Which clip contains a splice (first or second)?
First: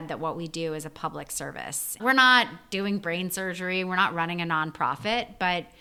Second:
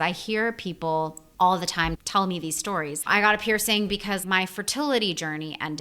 second